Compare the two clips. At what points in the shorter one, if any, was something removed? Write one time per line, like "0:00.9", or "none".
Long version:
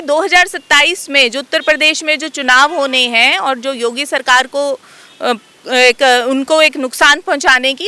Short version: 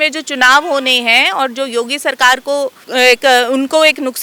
0:02.8